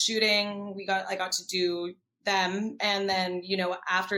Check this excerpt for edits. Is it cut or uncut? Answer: uncut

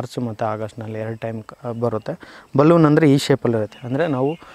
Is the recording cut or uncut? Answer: uncut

